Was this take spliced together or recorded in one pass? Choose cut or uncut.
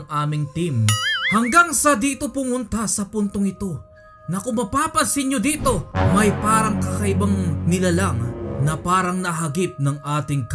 cut